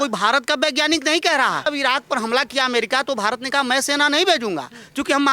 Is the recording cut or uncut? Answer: cut